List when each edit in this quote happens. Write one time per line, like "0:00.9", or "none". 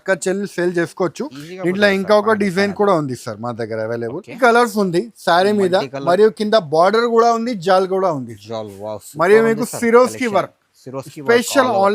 0:04.4